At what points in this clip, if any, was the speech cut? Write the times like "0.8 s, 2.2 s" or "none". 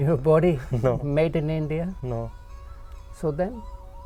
none